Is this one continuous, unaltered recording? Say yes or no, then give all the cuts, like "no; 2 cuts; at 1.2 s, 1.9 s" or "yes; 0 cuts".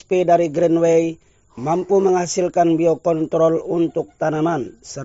yes; 0 cuts